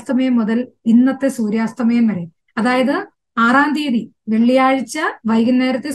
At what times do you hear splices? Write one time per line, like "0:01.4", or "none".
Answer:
none